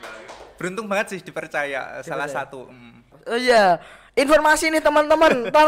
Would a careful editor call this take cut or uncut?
cut